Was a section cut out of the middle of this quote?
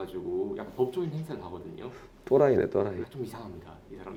no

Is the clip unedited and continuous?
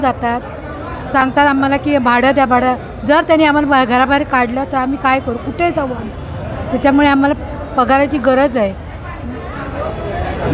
yes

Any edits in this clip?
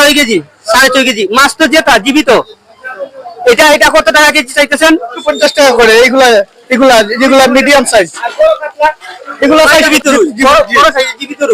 yes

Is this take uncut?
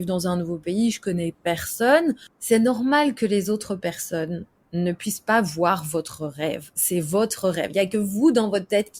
no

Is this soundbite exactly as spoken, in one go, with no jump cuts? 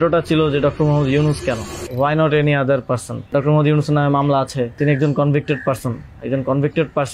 no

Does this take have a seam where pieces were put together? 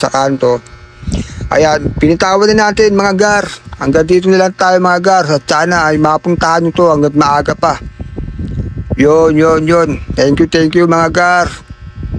no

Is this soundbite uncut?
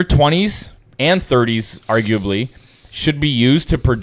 yes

